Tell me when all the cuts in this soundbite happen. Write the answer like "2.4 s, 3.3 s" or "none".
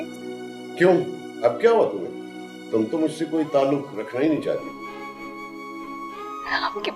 none